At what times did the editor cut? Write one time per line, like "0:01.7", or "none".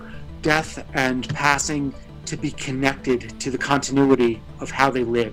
none